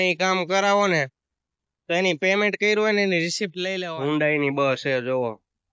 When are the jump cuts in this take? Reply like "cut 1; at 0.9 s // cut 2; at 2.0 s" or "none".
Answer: cut 1; at 3.9 s